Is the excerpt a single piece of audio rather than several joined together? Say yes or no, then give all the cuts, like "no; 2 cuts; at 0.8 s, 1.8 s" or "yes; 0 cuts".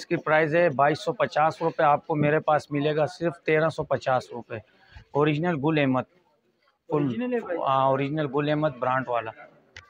yes; 0 cuts